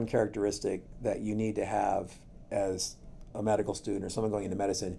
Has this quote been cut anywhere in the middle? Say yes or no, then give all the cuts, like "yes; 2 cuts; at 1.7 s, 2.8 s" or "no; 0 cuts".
no; 0 cuts